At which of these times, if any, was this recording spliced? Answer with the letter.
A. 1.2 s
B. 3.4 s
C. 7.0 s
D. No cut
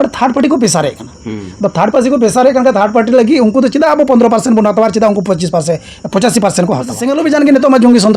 C